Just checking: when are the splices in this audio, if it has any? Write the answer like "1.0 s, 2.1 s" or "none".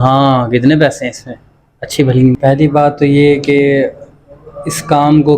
2.3 s

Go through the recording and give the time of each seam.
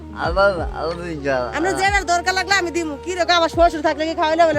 none

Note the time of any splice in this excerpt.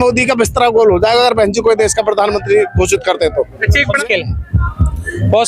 3.9 s

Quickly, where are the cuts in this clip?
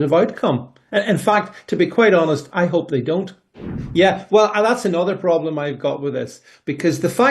3.8 s

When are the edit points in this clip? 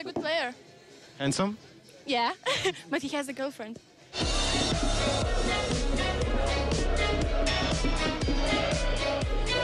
4.1 s

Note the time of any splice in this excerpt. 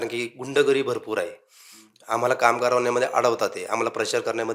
none

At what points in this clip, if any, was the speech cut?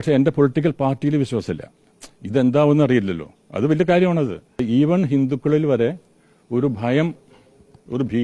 4.6 s

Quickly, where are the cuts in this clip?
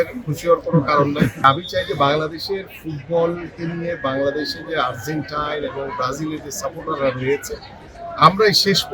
1.4 s

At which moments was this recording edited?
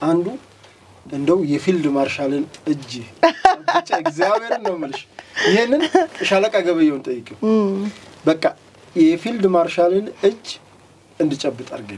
none

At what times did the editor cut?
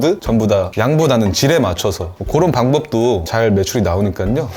2.2 s

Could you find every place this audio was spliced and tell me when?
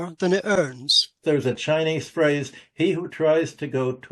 1.2 s

